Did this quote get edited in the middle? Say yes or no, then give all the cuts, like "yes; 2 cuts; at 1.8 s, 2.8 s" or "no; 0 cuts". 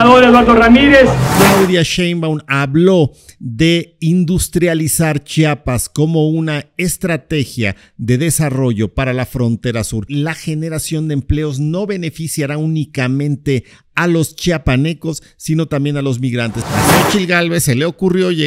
yes; 3 cuts; at 1.2 s, 10.1 s, 16.6 s